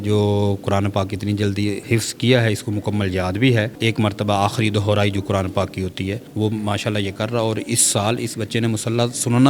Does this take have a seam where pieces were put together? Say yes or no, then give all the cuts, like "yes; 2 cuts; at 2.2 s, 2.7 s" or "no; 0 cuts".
yes; 3 cuts; at 1.8 s, 3.7 s, 6.3 s